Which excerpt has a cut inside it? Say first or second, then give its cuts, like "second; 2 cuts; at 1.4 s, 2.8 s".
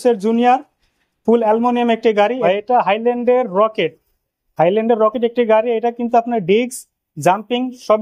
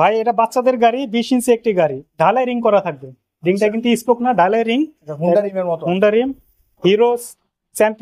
first; 1 cut; at 2.4 s